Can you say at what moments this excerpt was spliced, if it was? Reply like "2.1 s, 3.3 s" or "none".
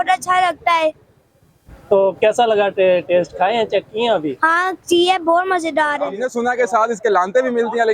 6.2 s